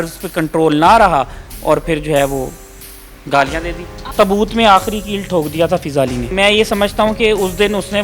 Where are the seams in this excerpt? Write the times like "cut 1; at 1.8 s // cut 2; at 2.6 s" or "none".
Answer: cut 1; at 4.0 s // cut 2; at 6.3 s